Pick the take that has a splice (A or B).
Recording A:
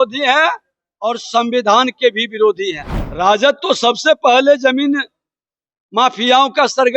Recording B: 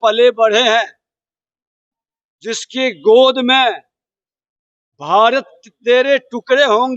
A